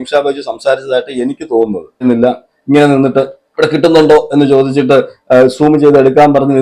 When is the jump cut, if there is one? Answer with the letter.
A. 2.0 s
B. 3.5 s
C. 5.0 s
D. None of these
A